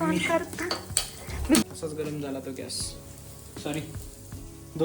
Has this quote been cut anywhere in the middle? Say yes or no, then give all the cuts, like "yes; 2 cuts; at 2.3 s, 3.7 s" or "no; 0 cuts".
yes; 1 cut; at 1.6 s